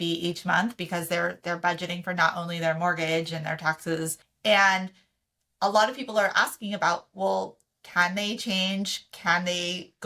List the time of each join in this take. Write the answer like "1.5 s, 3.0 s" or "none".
4.2 s